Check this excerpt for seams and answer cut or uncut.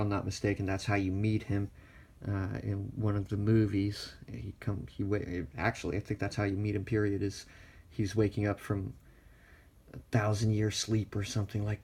cut